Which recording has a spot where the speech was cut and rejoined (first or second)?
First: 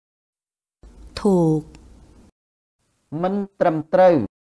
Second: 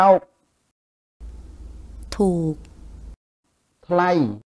first